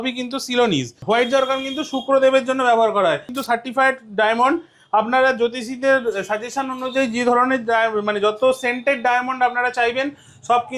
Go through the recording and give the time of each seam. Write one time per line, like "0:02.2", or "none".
0:01.0
0:03.3